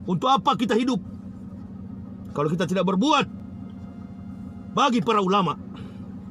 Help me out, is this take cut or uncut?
uncut